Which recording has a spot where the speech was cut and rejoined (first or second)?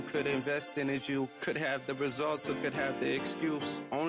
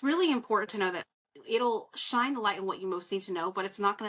second